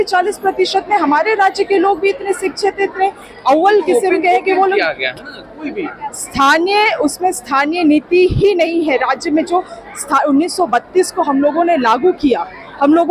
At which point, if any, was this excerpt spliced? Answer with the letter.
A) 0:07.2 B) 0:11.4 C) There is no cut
C